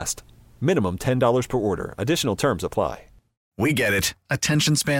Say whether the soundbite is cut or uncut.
cut